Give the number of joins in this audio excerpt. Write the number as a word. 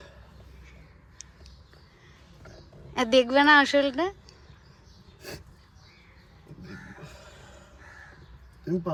zero